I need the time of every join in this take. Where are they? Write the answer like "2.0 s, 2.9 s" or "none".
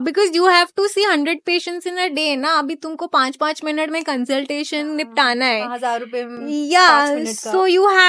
none